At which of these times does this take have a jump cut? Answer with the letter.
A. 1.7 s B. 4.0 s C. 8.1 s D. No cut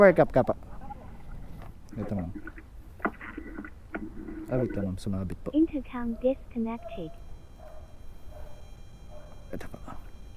A